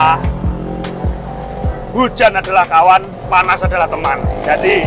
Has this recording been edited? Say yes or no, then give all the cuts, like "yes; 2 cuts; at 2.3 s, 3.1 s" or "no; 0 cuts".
no; 0 cuts